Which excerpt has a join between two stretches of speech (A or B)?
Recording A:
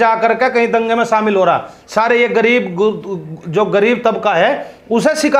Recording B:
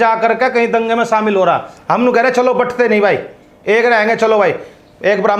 B